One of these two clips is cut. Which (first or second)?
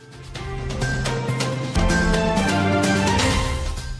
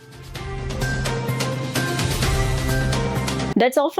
first